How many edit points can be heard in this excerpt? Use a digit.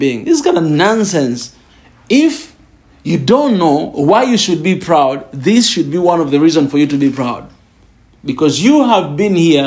1